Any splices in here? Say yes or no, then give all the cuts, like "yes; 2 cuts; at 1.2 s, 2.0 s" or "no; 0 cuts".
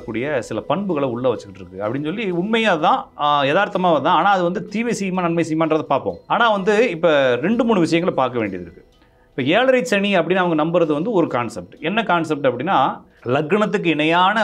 yes; 2 cuts; at 6.2 s, 13.1 s